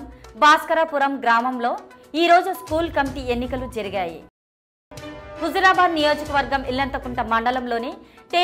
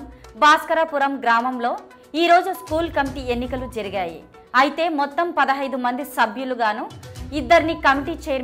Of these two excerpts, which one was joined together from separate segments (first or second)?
first